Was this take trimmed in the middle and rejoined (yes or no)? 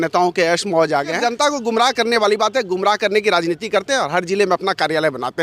yes